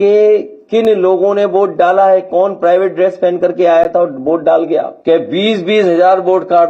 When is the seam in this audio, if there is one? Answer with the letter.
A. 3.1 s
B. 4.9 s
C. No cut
B